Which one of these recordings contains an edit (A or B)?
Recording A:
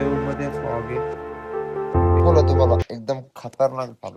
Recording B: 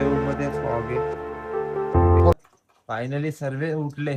B